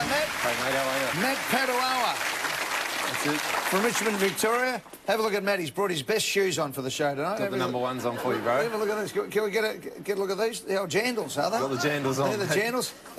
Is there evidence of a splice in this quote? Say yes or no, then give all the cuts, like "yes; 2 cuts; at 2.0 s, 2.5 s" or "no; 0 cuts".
no; 0 cuts